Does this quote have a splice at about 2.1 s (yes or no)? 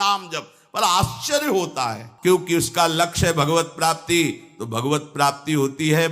yes